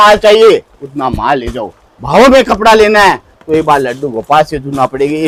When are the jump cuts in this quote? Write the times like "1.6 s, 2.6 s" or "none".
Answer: none